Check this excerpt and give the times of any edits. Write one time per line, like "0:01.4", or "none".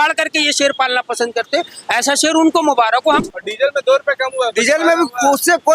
0:03.0

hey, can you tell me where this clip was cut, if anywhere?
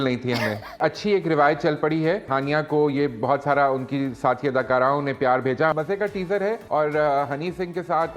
0:00.8
0:02.3
0:05.7
0:06.6

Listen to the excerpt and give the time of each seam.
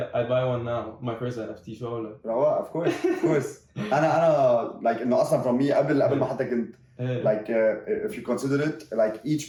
none

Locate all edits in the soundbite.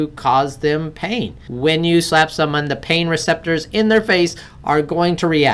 0:01.4

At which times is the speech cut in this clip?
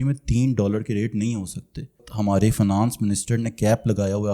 0:02.1

